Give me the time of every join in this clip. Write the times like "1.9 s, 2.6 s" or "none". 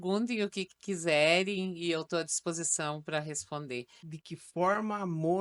4.0 s